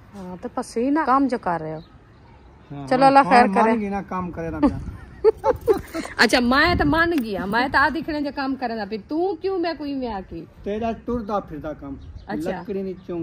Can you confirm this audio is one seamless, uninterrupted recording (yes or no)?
no